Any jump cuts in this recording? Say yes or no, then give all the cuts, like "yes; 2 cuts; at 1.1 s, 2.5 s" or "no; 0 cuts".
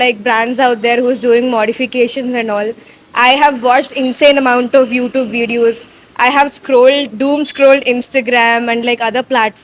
no; 0 cuts